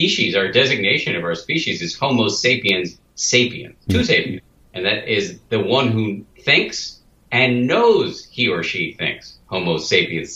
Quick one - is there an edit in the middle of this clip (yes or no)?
yes